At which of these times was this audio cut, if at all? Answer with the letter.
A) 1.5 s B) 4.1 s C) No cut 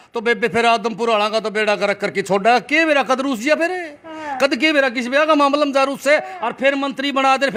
C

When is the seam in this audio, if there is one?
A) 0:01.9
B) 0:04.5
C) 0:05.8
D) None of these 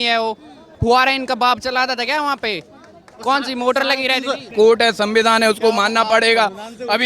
B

